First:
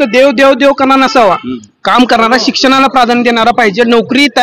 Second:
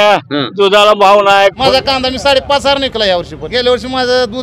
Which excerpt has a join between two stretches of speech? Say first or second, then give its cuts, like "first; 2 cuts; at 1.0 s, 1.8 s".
second; 2 cuts; at 1.6 s, 3.4 s